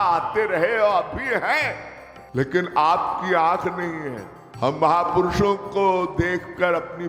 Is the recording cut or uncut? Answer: uncut